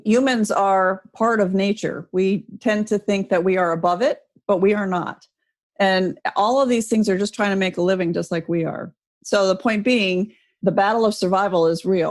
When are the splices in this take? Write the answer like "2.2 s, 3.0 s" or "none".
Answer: 10.5 s